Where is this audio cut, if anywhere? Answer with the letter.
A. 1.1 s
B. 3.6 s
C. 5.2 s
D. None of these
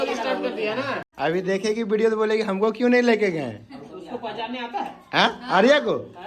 A